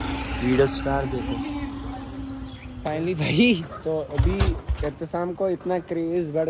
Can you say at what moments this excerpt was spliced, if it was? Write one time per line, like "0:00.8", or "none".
0:02.8